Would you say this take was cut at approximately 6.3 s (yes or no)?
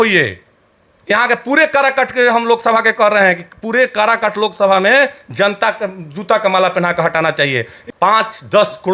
no